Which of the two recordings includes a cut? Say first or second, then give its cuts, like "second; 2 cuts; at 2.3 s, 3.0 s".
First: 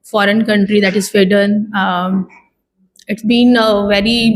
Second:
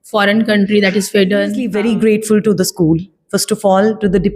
second; 1 cut; at 1.6 s